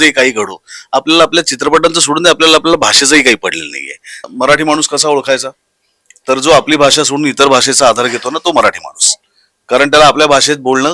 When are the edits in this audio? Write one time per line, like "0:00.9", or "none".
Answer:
0:04.3